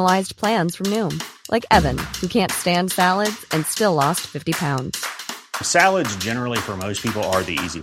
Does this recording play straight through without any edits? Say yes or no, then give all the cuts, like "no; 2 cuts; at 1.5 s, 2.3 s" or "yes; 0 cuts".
yes; 0 cuts